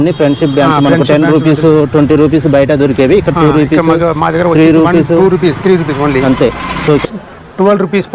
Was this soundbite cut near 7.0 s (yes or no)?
yes